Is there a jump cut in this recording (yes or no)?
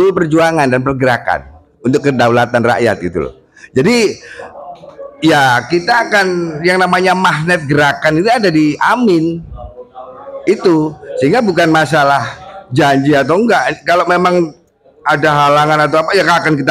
no